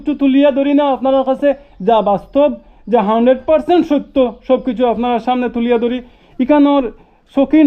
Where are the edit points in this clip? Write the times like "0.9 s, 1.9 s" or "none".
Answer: 6.2 s

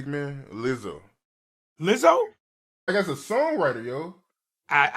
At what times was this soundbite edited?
none

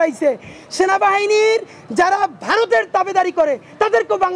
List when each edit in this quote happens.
none

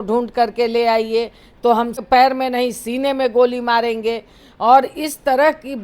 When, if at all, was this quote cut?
2.0 s

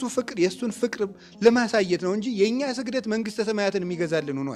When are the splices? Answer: none

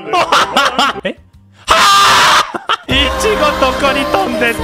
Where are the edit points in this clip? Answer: 2.8 s

